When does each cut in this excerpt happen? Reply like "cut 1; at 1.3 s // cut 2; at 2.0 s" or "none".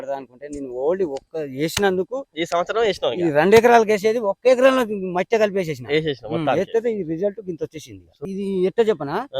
cut 1; at 8.1 s